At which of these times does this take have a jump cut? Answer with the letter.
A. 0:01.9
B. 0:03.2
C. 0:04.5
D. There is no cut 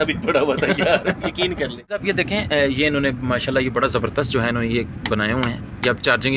A